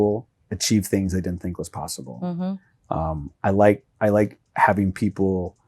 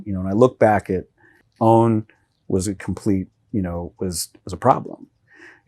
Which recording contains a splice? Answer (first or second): second